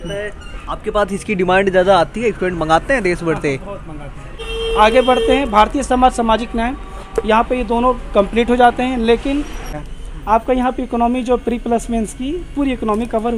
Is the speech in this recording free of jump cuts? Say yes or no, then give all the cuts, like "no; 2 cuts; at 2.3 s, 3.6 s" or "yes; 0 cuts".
no; 2 cuts; at 4.3 s, 9.7 s